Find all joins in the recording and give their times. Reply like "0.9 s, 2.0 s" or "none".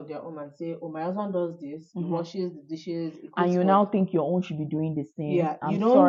none